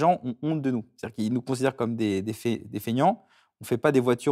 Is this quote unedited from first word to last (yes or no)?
yes